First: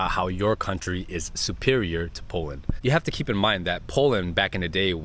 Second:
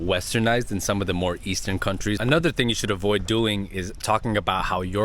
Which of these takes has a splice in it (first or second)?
second